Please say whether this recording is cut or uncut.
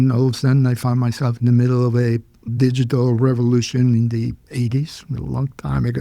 cut